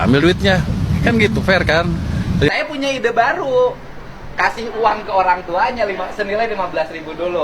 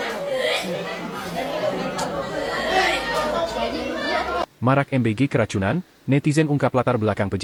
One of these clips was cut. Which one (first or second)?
first